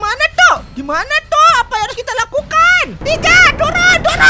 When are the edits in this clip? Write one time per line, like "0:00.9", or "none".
0:03.0

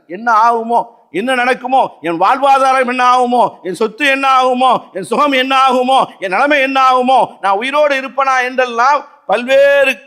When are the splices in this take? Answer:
none

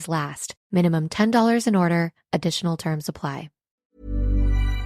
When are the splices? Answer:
0:03.7

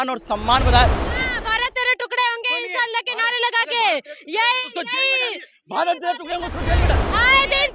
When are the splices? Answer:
none

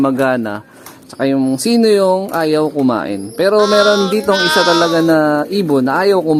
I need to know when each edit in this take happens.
none

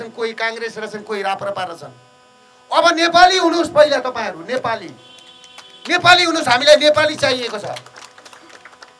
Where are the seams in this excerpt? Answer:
none

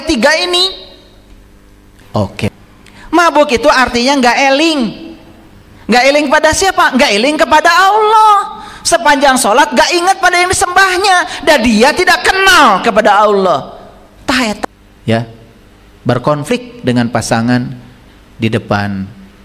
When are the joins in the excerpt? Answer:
0:02.5
0:14.6

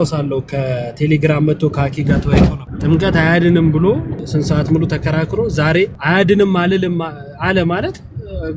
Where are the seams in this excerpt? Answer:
0:02.7
0:04.2
0:06.0

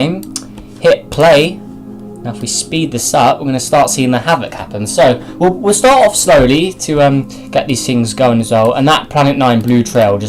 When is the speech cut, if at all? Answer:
0:02.6

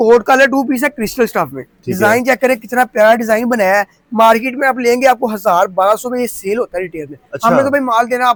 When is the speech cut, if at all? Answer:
none

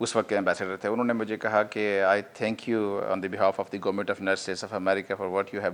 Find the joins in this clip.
none

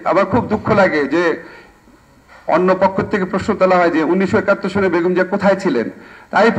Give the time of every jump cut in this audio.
none

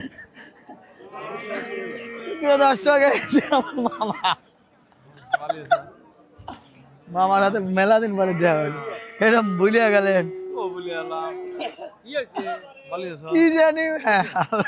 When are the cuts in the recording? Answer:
none

